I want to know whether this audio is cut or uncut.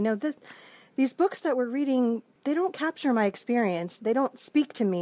cut